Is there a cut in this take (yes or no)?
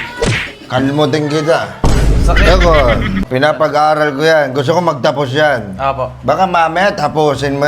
yes